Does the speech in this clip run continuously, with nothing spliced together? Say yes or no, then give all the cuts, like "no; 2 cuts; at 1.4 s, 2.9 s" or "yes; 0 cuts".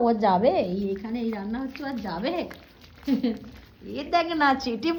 yes; 0 cuts